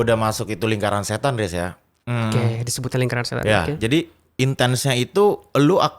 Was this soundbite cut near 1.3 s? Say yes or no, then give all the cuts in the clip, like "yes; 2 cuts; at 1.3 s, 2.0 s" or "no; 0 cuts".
no; 0 cuts